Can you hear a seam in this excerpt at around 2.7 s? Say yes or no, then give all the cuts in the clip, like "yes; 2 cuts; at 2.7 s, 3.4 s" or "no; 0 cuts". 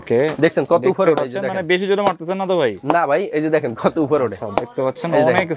no; 0 cuts